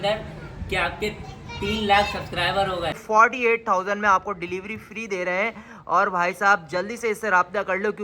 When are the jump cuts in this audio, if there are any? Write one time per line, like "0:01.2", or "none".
0:03.0